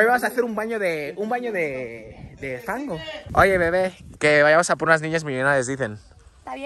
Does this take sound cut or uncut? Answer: cut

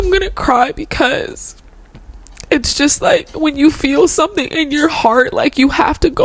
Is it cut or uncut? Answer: uncut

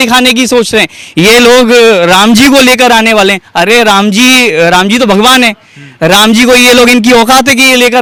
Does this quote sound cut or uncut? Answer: uncut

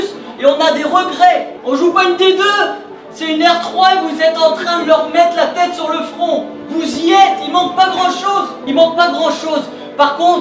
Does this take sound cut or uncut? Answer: cut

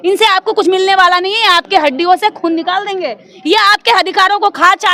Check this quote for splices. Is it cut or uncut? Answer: uncut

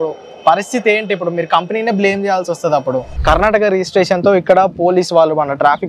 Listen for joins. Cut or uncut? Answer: cut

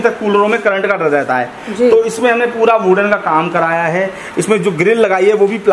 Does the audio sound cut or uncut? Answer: uncut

